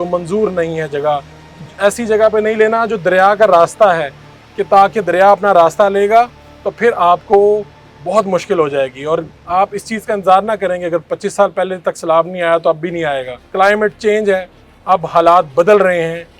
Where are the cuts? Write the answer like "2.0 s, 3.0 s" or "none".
13.4 s

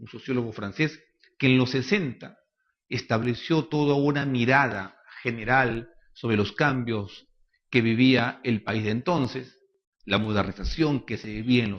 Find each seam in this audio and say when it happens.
none

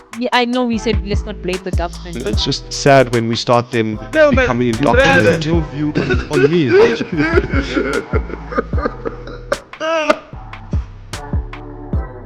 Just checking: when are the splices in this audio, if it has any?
10.3 s

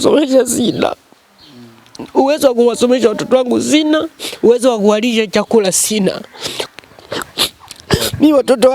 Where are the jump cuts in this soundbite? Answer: 6.5 s

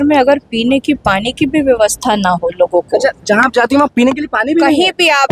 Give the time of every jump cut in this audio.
none

